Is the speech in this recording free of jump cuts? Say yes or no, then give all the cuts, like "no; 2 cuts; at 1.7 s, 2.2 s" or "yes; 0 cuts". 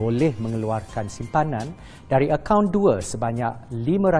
yes; 0 cuts